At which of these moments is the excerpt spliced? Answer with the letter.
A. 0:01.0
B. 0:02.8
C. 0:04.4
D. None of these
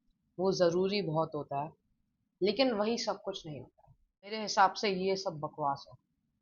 C